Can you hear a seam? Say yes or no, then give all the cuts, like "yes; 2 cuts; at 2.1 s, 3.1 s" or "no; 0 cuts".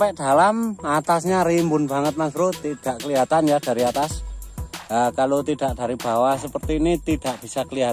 no; 0 cuts